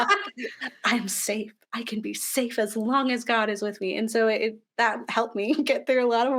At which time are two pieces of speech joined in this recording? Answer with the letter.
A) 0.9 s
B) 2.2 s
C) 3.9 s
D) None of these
C